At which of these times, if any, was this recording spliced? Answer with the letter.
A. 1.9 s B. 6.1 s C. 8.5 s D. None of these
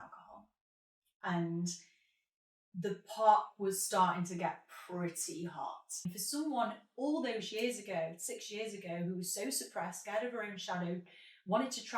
B